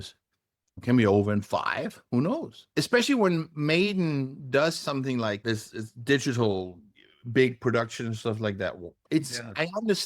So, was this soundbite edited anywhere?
yes; 2 cuts; at 2.6 s, 8.9 s

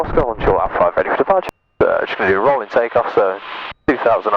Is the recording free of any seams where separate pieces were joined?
no; 1 cut; at 1.4 s

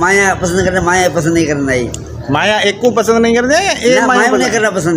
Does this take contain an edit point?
yes; 1 cut; at 2.2 s

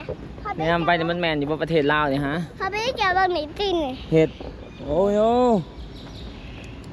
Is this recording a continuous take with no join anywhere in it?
yes; 0 cuts

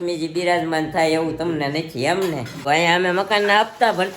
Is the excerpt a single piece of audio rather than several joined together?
no; 1 cut; at 2.6 s

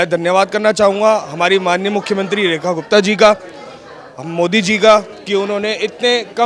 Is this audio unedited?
yes; 0 cuts

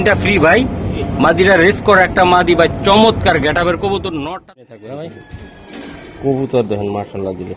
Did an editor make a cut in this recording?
yes; 1 cut; at 4.2 s

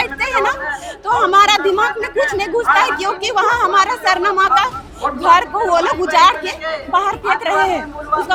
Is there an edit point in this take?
no; 0 cuts

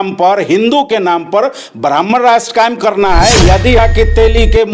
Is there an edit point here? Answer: yes; 1 cut; at 3.8 s

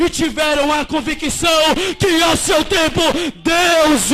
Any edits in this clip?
no; 0 cuts

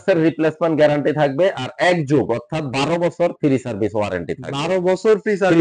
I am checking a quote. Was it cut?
no; 0 cuts

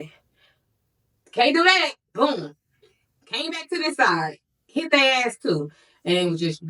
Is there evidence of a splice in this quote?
no; 0 cuts

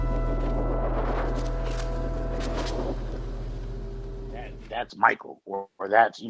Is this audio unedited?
no; 1 cut; at 4.6 s

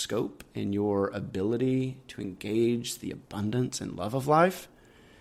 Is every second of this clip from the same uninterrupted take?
yes; 0 cuts

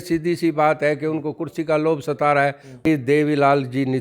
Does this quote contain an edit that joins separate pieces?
yes; 1 cut; at 2.9 s

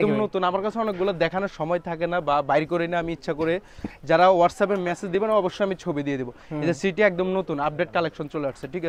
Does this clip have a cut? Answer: no; 0 cuts

